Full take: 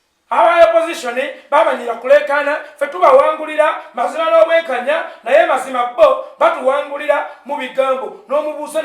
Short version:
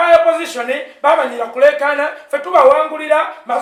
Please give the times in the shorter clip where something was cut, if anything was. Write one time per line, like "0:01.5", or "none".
none